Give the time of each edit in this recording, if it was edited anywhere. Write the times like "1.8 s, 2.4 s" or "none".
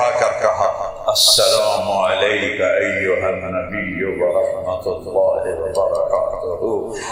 none